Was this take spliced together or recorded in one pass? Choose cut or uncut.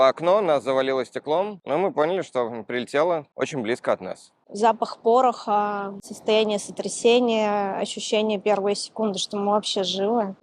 uncut